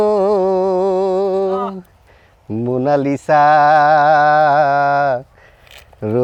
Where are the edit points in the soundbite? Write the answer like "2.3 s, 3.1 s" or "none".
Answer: none